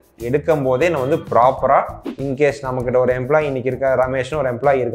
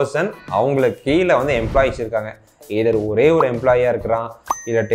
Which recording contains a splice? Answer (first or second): first